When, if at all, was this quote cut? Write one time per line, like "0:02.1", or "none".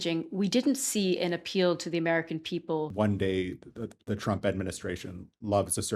0:02.9

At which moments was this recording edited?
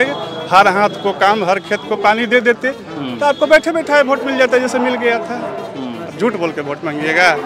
none

